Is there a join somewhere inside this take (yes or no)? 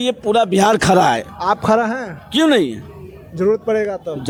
no